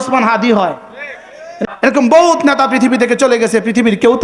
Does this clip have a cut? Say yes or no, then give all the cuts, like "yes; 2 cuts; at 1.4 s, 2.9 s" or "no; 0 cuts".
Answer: yes; 1 cut; at 1.5 s